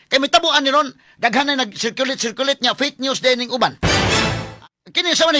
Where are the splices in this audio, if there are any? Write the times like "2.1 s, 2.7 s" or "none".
4.5 s